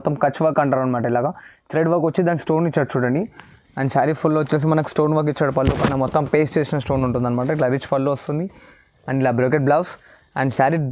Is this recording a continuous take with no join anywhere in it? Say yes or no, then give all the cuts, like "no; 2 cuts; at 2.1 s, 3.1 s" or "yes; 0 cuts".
yes; 0 cuts